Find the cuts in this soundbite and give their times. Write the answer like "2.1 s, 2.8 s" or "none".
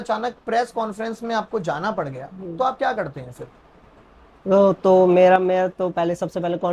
none